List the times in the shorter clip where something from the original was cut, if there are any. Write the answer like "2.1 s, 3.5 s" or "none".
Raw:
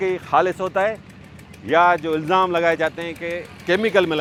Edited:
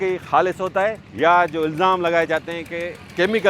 1.1 s